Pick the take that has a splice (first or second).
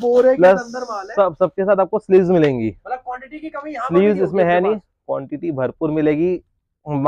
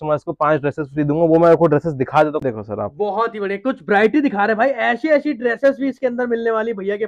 second